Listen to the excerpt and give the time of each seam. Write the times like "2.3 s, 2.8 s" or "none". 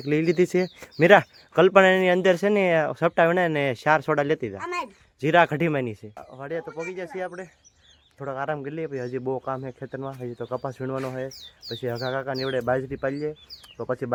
none